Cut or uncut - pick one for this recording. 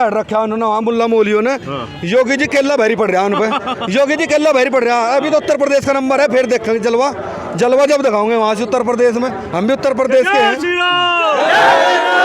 uncut